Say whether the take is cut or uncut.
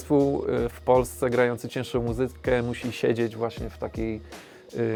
uncut